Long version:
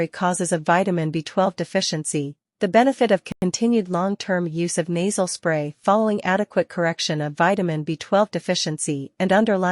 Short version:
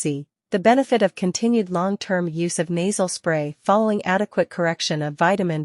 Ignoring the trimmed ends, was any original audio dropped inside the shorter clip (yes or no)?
yes